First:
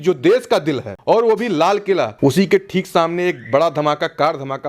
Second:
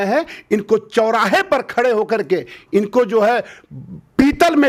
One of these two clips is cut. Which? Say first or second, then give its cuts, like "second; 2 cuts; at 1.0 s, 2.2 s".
first; 2 cuts; at 0.9 s, 2.1 s